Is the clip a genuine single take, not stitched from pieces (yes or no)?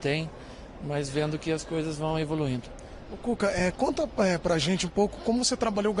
no